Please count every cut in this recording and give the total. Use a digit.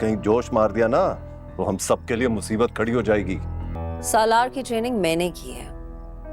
1